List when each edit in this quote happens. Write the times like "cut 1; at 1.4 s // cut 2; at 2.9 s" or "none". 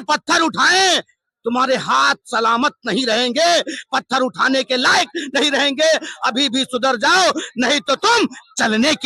none